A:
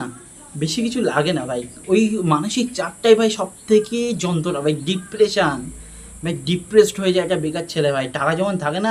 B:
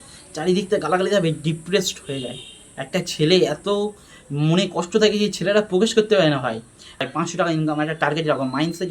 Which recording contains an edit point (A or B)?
B